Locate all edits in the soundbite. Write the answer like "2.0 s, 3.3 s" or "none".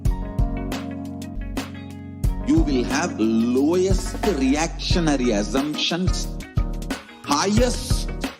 1.4 s